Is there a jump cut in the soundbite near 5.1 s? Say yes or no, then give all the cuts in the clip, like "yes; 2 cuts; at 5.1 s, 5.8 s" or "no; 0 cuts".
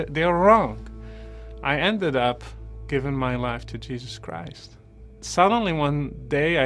yes; 1 cut; at 5.1 s